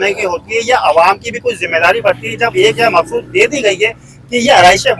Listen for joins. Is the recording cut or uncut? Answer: uncut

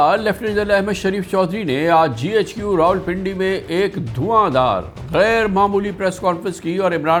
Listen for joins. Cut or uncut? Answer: uncut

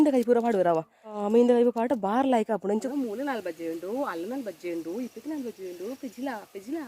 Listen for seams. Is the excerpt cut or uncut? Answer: cut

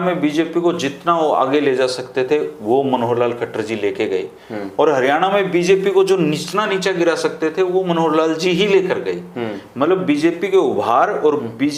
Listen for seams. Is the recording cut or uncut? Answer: uncut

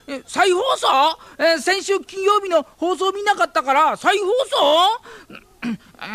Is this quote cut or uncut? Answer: uncut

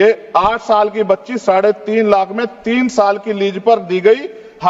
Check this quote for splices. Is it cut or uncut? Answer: uncut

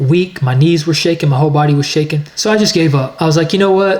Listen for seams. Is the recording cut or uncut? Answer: cut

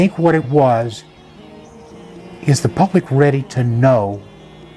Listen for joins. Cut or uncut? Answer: uncut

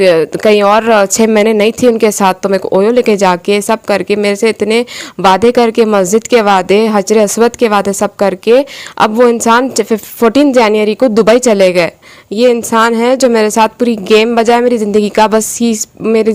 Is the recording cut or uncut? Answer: uncut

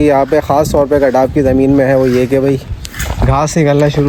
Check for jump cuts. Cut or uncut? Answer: uncut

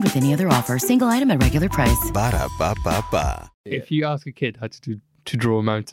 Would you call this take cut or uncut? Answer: cut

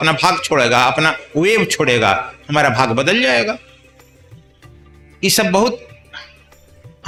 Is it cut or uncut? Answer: uncut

